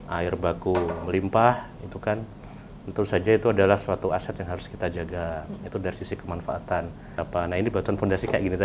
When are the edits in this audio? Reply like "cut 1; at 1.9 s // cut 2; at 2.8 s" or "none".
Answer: cut 1; at 7.2 s